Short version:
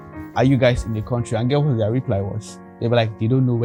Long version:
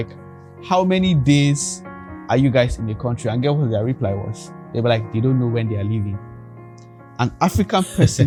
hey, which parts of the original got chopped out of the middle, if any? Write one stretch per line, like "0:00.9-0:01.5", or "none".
none